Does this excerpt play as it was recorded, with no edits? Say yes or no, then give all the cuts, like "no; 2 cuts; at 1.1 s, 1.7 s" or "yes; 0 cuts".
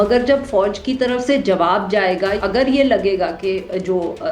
no; 1 cut; at 2.4 s